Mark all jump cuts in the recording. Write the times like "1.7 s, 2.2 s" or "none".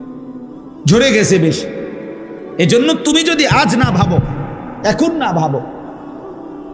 1.0 s